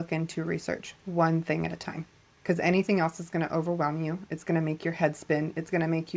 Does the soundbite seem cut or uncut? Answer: uncut